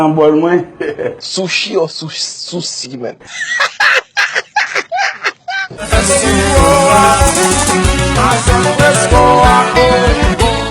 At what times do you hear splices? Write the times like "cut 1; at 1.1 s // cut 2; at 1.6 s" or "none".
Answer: cut 1; at 5.7 s

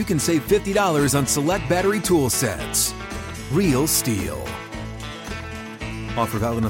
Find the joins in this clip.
none

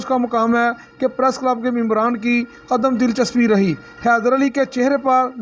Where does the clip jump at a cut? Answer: cut 1; at 3.8 s

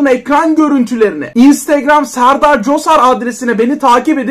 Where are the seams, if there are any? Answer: cut 1; at 1.2 s

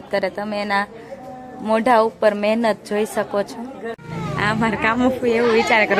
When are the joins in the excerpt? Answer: cut 1; at 4.0 s

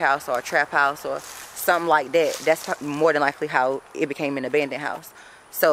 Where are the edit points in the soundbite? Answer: none

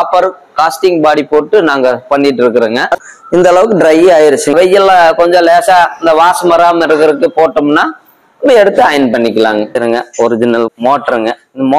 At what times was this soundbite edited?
cut 1; at 2.9 s // cut 2; at 9.8 s

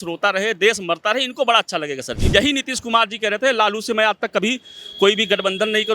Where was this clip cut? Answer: cut 1; at 2.1 s

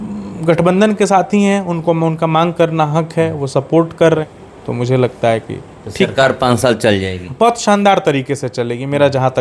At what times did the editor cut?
cut 1; at 4.2 s

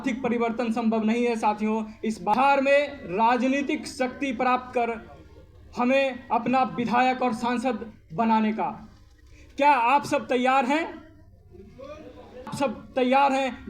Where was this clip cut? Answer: cut 1; at 2.3 s // cut 2; at 12.5 s

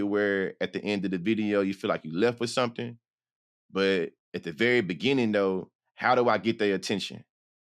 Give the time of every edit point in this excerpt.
none

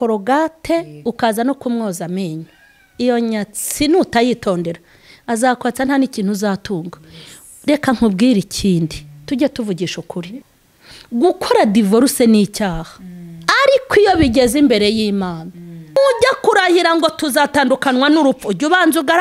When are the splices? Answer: cut 1; at 10.4 s // cut 2; at 16.0 s

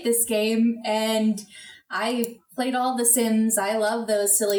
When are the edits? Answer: none

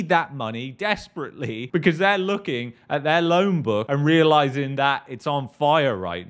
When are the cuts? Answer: none

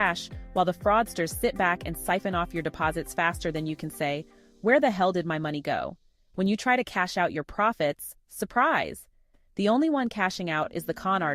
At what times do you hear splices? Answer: none

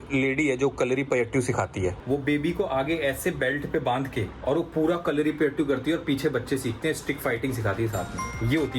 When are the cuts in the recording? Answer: cut 1; at 2.0 s // cut 2; at 4.3 s

